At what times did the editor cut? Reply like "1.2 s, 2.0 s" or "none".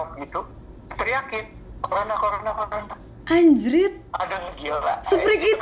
none